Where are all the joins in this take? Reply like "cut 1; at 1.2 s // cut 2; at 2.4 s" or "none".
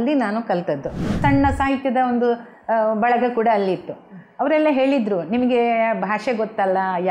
cut 1; at 1.2 s